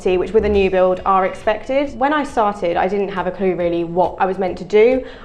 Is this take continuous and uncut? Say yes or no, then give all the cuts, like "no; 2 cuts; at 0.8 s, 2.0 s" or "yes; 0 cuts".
no; 2 cuts; at 1.9 s, 4.1 s